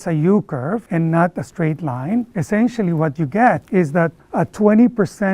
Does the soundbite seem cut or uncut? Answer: cut